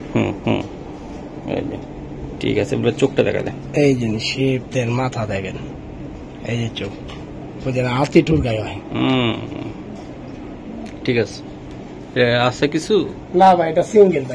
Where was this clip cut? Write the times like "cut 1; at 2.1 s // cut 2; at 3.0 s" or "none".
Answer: none